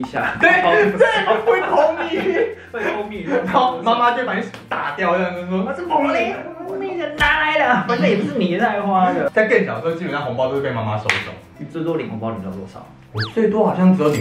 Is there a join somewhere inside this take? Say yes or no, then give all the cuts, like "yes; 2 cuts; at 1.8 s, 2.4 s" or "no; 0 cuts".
no; 0 cuts